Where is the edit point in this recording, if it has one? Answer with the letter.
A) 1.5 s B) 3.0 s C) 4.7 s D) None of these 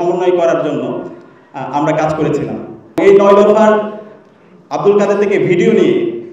B